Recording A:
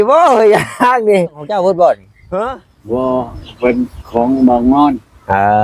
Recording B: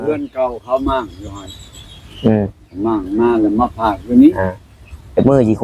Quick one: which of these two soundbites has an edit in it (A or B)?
A